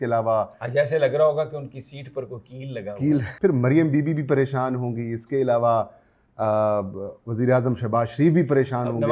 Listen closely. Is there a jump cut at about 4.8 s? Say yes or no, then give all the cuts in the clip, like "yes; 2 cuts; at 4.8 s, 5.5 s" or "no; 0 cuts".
no; 1 cut; at 3.3 s